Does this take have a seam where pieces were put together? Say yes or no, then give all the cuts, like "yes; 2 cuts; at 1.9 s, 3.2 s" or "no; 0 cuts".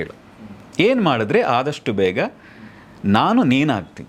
no; 0 cuts